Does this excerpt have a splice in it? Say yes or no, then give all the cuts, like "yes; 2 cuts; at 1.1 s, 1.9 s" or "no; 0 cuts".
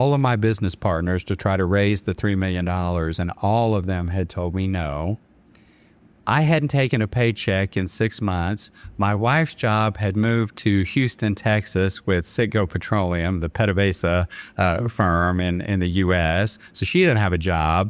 no; 0 cuts